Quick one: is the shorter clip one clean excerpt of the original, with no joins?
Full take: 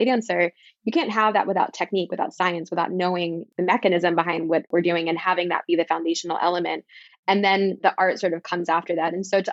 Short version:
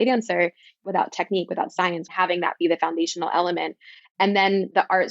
no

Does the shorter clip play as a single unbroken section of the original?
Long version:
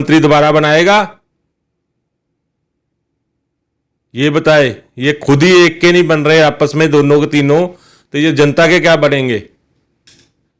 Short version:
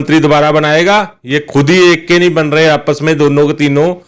no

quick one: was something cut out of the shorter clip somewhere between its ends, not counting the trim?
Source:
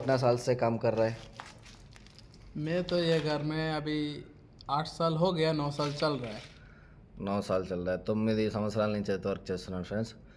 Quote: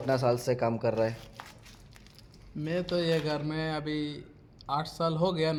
no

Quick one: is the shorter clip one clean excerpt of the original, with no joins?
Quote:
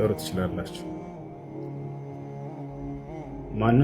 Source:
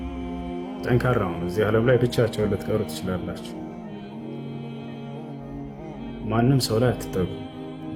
yes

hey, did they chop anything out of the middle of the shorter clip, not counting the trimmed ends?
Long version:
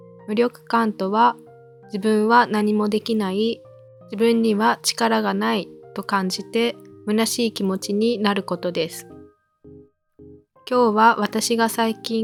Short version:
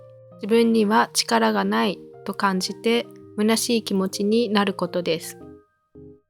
no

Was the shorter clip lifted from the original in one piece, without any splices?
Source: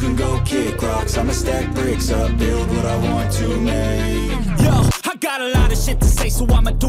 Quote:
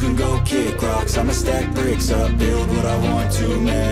yes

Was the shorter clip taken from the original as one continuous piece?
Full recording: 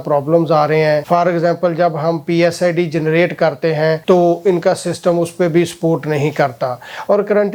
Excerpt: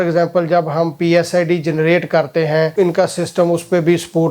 no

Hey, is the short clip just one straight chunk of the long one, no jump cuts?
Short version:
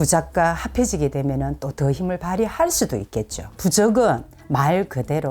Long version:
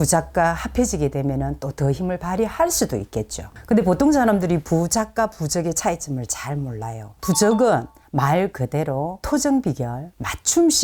no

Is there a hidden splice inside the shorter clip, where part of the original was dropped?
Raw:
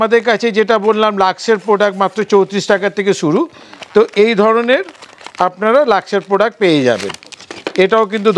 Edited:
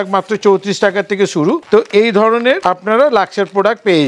yes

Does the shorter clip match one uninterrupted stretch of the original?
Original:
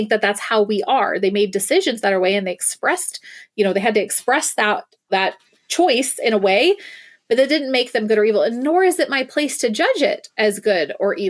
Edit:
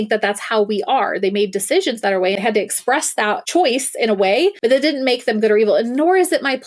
no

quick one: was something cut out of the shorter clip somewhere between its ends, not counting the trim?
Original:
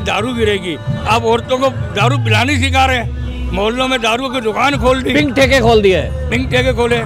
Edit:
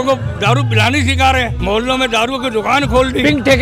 yes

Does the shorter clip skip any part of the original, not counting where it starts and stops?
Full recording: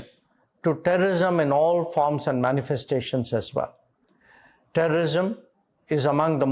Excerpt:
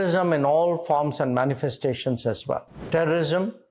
yes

